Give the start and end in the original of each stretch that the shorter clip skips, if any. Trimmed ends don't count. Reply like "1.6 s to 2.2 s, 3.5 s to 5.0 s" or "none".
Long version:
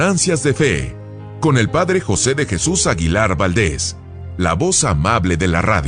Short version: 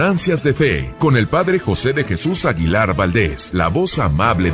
0.9 s to 1.3 s, 3.8 s to 4.3 s